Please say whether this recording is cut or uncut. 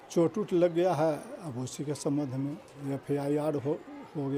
uncut